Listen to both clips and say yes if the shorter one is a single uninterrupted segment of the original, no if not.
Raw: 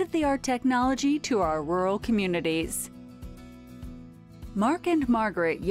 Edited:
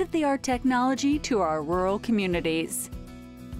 no